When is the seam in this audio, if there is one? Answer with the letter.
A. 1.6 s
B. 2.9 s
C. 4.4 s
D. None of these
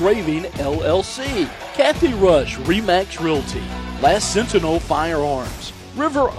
A